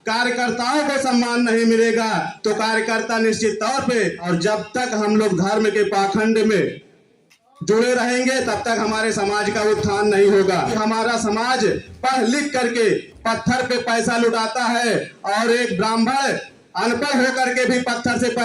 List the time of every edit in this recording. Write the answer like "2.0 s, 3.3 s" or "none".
4.2 s, 10.7 s